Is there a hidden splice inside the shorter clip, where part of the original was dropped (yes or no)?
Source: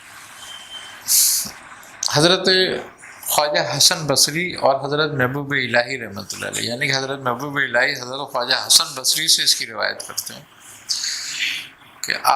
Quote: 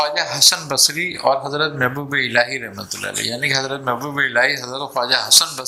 no